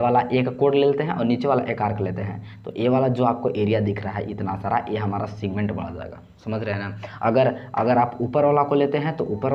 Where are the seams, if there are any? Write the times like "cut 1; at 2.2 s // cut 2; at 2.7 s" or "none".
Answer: none